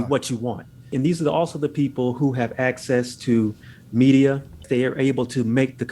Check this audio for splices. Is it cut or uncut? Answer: cut